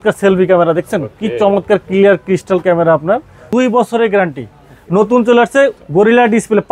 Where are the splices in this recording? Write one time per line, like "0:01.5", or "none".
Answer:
0:03.4
0:05.8